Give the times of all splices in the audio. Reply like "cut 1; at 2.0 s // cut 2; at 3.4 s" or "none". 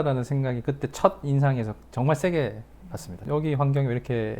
cut 1; at 3.2 s

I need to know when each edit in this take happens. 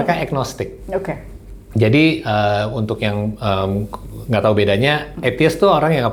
none

